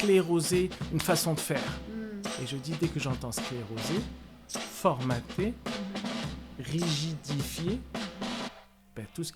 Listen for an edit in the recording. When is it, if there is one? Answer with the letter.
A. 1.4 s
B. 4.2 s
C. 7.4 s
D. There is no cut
D